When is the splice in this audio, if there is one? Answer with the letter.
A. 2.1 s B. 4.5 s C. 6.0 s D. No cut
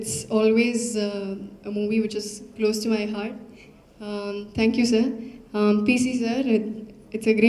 D